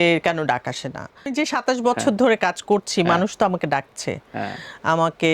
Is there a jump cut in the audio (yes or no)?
yes